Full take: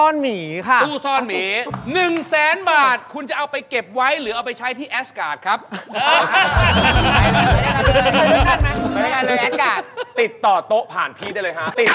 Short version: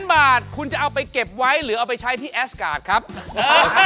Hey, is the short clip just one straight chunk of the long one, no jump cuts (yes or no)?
yes